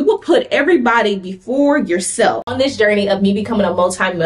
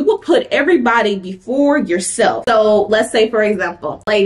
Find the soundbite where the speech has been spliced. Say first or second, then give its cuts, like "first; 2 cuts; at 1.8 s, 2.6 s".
first; 1 cut; at 2.4 s